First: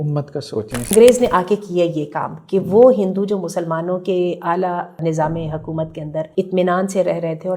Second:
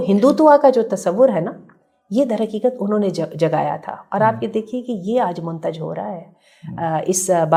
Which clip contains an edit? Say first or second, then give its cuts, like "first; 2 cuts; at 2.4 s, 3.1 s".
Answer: first; 3 cuts; at 0.9 s, 5.0 s, 6.3 s